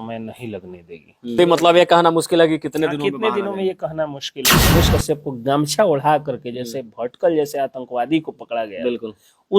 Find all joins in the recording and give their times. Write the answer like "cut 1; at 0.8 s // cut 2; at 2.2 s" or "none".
cut 1; at 1.4 s // cut 2; at 4.7 s